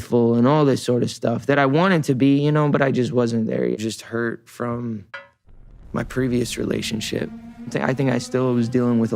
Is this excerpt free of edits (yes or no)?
no